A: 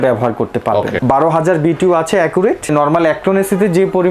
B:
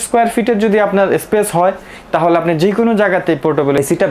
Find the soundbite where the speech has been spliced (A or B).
A